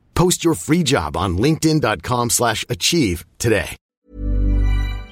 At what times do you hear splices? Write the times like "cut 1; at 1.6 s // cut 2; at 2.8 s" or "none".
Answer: cut 1; at 3.9 s